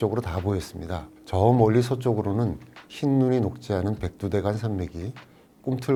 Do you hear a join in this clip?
no; 0 cuts

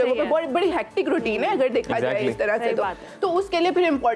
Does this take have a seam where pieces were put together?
no; 0 cuts

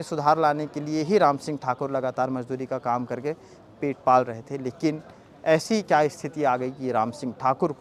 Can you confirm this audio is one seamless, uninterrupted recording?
yes; 0 cuts

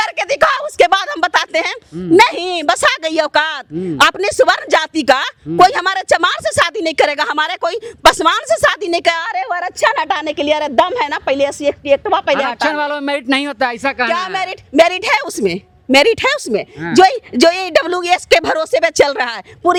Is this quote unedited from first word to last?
yes; 0 cuts

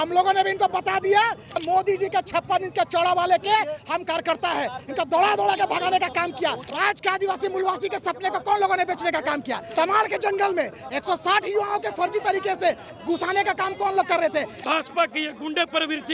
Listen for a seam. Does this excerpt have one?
yes; 4 cuts; at 1.6 s, 6.6 s, 9.6 s, 14.5 s

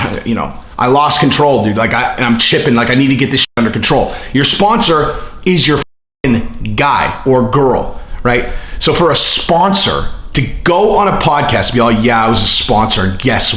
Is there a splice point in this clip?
no; 0 cuts

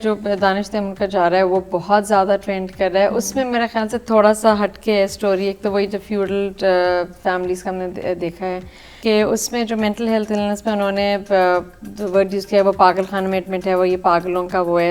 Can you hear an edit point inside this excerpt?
no; 0 cuts

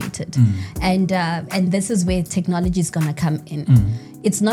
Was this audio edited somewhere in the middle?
no; 0 cuts

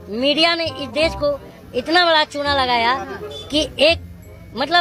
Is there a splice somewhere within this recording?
no; 0 cuts

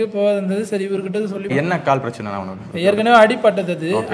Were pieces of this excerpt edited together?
yes; 1 cut; at 1.5 s

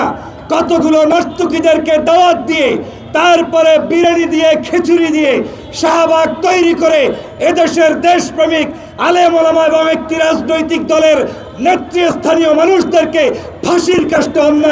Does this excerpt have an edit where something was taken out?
no; 0 cuts

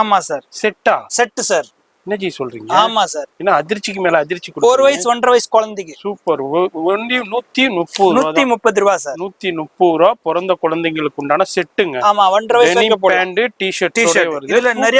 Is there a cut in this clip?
no; 0 cuts

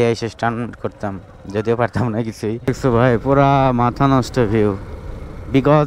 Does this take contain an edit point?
yes; 1 cut; at 2.7 s

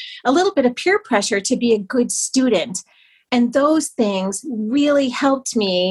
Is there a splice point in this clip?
no; 0 cuts

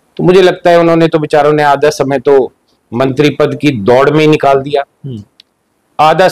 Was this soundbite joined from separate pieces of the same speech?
no; 0 cuts

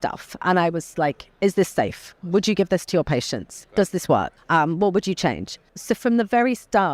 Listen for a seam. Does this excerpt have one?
yes; 2 cuts; at 4.4 s, 5.7 s

